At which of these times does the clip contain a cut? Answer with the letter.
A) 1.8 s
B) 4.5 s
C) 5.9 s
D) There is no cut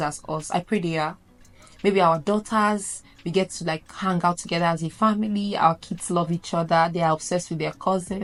D